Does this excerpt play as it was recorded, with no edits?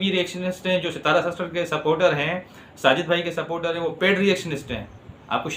yes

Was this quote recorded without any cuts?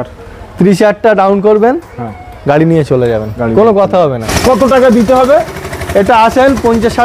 no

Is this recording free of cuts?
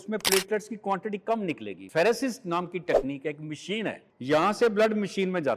no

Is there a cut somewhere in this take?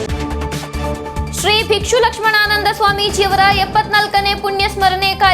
yes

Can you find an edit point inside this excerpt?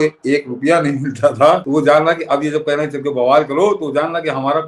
yes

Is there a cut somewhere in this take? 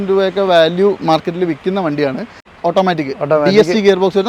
yes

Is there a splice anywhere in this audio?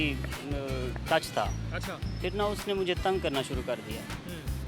no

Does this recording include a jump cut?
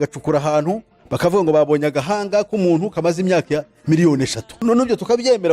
yes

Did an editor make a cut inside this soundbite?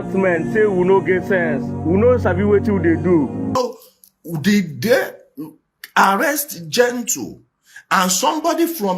yes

